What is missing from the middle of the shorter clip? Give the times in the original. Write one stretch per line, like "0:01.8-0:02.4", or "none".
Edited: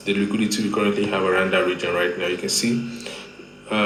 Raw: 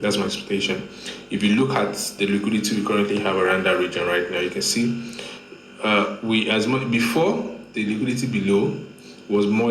none